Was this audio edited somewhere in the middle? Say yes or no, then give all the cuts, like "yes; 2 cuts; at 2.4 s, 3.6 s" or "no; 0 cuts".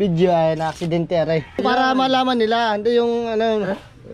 yes; 1 cut; at 1.6 s